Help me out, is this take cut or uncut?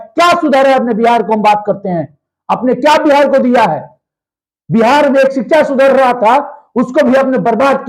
uncut